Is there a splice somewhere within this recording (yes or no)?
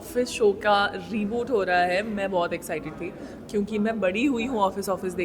no